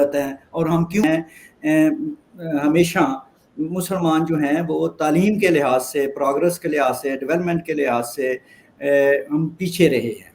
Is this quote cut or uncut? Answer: cut